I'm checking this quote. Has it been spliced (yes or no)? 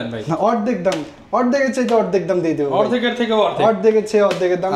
no